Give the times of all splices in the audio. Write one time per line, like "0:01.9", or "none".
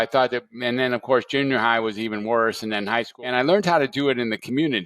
0:03.1